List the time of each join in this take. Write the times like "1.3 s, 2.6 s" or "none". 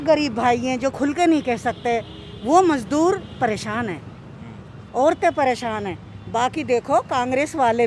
none